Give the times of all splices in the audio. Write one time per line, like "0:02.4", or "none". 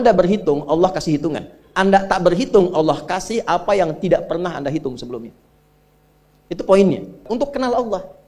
0:07.3